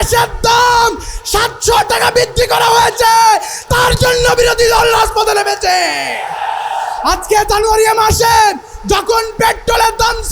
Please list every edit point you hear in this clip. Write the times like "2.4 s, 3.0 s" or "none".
none